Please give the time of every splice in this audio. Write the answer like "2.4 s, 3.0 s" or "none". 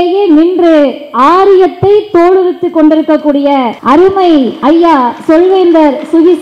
3.8 s, 4.5 s